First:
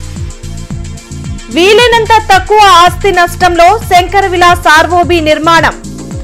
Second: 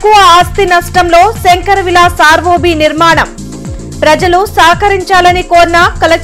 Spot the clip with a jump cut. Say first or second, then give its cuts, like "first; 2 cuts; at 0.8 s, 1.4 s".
first; 1 cut; at 1.3 s